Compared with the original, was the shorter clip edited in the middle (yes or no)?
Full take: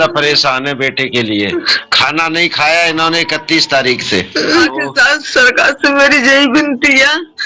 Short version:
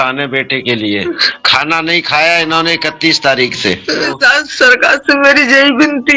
yes